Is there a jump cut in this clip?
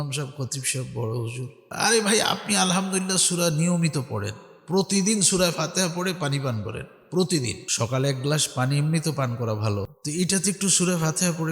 yes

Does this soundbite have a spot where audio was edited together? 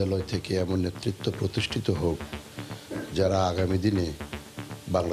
no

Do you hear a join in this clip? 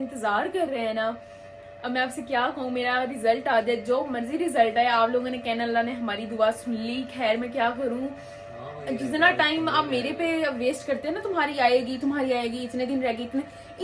no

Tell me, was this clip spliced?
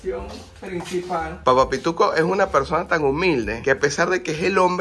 no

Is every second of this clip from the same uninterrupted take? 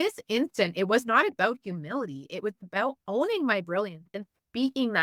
yes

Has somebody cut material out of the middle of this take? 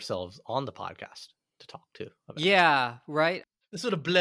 no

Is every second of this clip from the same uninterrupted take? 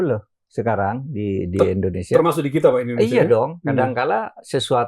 yes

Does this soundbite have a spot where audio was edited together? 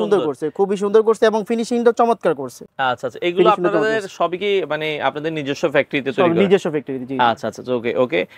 no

